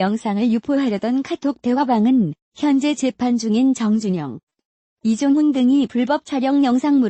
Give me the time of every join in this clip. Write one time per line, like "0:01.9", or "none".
0:05.3